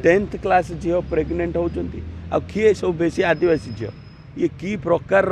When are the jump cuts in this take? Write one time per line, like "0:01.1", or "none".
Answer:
none